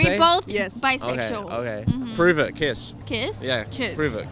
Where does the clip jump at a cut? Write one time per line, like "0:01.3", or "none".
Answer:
0:02.9